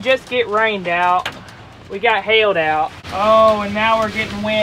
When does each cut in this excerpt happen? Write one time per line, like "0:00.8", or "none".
0:03.0